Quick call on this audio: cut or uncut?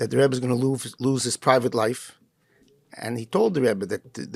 uncut